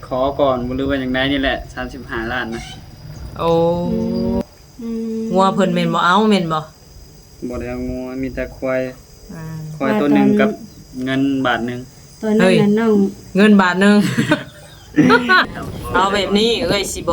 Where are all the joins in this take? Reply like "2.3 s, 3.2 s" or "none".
4.4 s, 15.5 s